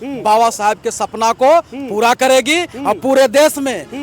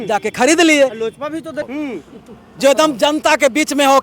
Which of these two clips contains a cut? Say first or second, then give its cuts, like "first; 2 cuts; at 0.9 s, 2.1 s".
second; 1 cut; at 1.7 s